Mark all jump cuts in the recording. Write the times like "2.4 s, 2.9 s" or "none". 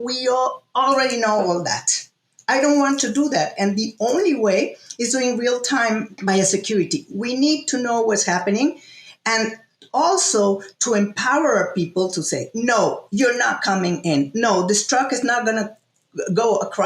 6.1 s